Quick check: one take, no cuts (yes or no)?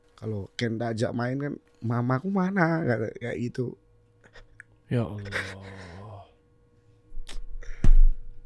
no